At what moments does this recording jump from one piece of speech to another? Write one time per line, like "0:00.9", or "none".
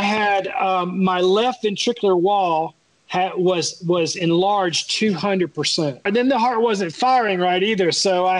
0:06.1